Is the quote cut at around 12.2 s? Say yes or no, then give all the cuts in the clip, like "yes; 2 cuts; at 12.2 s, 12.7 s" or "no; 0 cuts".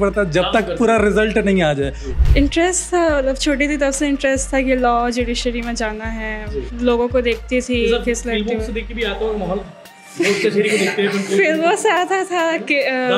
no; 1 cut; at 2.0 s